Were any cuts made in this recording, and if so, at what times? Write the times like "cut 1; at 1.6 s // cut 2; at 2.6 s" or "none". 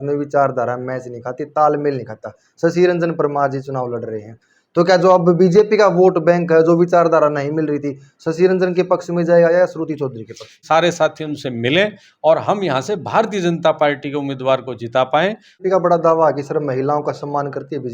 cut 1; at 10.6 s // cut 2; at 15.5 s